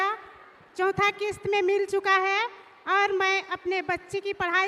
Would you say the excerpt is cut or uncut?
uncut